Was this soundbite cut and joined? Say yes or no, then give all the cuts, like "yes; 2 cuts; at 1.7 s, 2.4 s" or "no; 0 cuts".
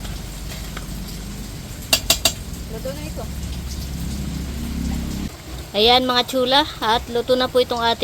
no; 0 cuts